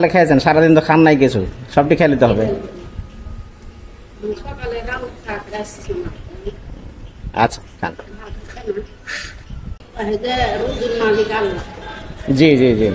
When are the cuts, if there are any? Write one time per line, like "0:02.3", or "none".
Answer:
0:09.9